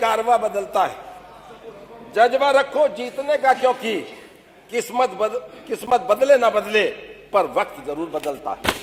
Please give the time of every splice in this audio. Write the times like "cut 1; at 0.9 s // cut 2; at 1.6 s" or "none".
none